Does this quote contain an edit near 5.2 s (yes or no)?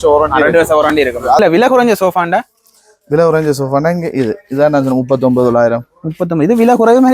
no